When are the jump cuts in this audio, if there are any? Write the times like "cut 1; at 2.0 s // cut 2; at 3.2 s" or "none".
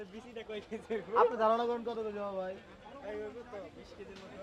none